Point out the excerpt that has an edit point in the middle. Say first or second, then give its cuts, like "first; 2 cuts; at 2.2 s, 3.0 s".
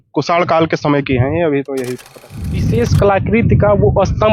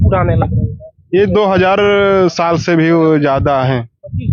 first; 1 cut; at 2.4 s